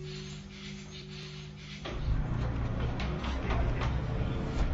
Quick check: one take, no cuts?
no; 1 cut; at 1.7 s

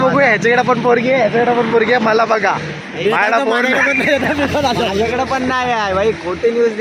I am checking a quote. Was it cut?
no; 0 cuts

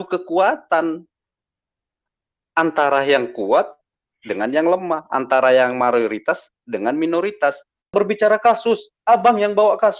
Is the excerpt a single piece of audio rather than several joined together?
no; 1 cut; at 7.9 s

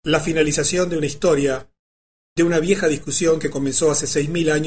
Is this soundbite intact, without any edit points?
yes; 0 cuts

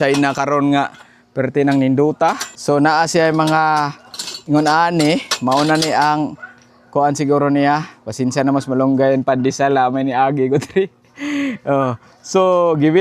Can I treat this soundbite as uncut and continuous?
no; 1 cut; at 2.5 s

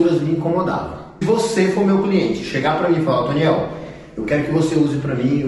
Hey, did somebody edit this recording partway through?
yes; 1 cut; at 1.2 s

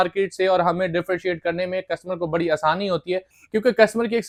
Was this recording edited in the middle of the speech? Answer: no; 0 cuts

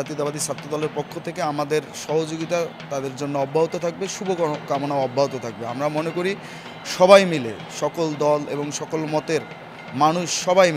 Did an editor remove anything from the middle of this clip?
no; 0 cuts

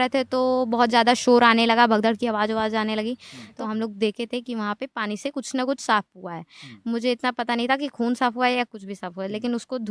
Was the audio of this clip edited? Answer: yes; 1 cut; at 3.4 s

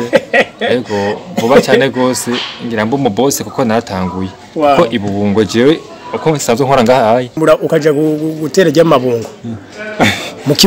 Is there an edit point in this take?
yes; 1 cut; at 7.4 s

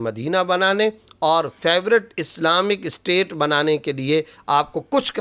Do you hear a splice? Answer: no; 0 cuts

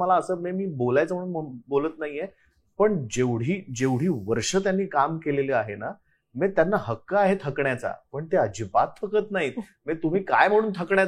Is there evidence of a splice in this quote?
no; 0 cuts

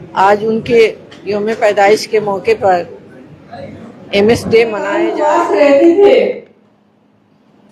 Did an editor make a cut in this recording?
yes; 1 cut; at 5.2 s

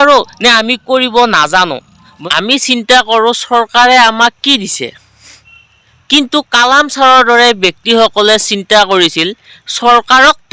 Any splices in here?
yes; 1 cut; at 2.1 s

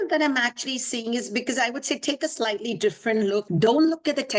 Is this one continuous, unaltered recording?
no; 1 cut; at 3.5 s

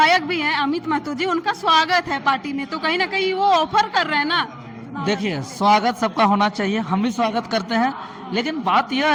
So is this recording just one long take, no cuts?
yes; 0 cuts

